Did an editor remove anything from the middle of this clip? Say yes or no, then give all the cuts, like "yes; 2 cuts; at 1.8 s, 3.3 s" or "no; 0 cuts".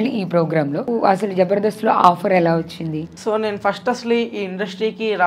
yes; 2 cuts; at 0.9 s, 3.1 s